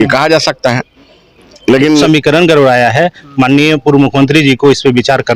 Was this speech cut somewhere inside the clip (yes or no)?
yes